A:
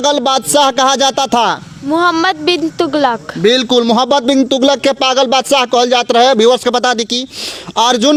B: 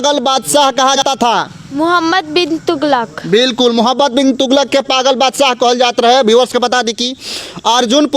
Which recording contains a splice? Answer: B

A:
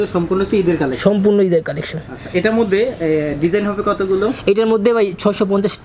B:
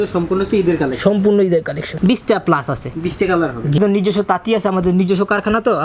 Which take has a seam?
B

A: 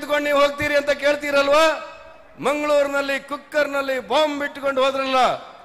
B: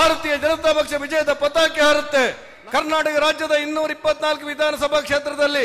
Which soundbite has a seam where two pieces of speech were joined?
B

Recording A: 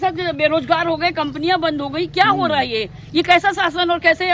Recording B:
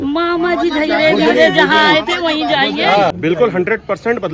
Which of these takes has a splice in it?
B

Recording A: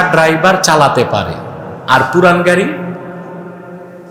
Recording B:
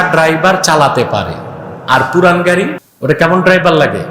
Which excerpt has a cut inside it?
B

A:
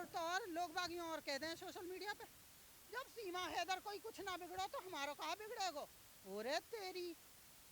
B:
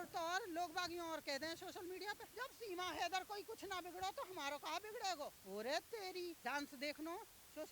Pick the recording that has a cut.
B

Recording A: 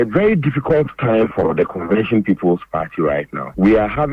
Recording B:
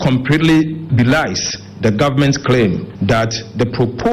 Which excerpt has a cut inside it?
B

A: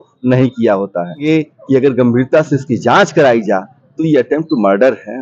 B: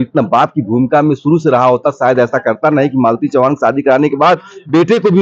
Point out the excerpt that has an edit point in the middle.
A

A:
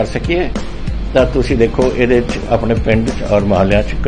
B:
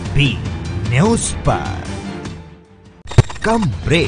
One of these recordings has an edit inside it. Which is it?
B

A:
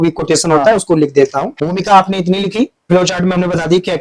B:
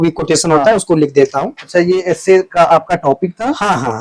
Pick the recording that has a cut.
A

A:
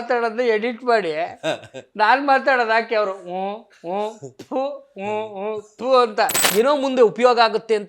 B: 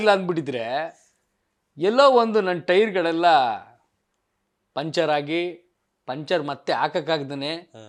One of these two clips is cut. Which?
A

